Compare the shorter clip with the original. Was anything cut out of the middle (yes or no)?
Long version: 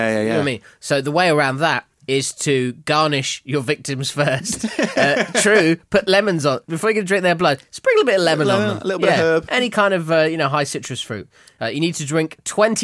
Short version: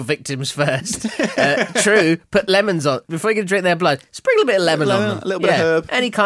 no